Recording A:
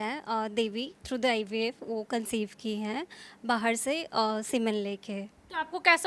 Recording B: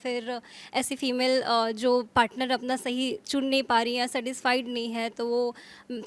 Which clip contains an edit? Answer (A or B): A